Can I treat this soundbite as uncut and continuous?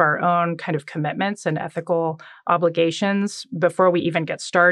yes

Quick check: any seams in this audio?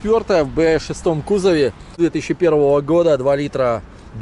yes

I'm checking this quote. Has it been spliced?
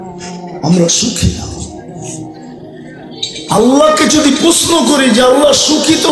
no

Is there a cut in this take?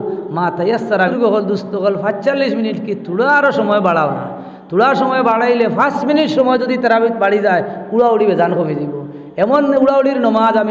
yes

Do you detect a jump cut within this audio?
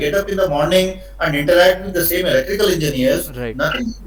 no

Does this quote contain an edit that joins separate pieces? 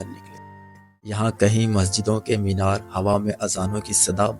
yes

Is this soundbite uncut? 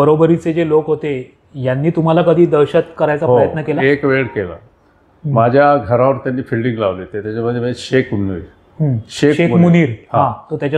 yes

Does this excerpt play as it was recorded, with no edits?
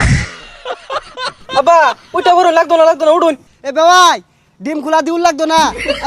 no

